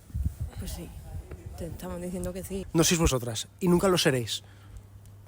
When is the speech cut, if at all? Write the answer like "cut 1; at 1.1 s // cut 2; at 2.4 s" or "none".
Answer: cut 1; at 2.6 s